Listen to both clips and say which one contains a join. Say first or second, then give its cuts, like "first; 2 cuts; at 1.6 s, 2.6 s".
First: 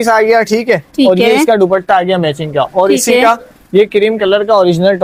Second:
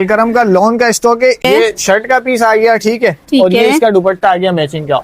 second; 1 cut; at 1.4 s